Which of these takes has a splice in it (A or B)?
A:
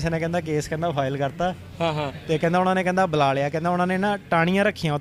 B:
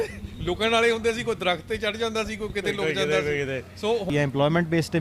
B